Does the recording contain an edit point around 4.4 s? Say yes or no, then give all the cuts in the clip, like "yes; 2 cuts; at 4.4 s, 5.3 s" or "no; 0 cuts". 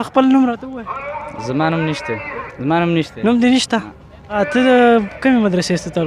yes; 2 cuts; at 2.4 s, 4.4 s